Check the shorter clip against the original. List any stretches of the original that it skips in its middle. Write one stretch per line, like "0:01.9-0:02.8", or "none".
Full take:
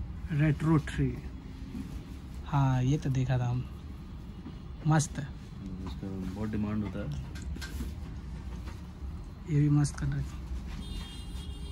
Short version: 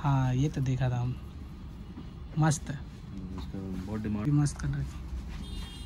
0:06.7-0:09.6